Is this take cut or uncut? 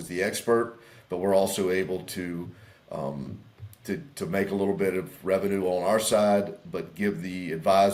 uncut